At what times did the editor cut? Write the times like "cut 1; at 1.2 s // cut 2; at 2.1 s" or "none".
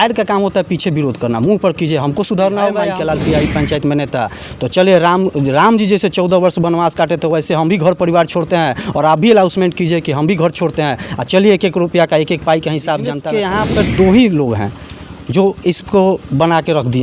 cut 1; at 2.9 s // cut 2; at 13.2 s